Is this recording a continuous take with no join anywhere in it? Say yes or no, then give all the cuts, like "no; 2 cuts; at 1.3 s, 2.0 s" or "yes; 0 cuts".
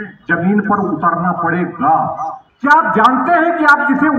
no; 1 cut; at 2.4 s